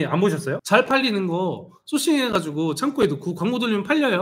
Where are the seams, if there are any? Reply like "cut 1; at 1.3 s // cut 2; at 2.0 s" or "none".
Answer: none